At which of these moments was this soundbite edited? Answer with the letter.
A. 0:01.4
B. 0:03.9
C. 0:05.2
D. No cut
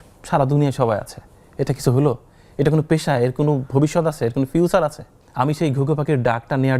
C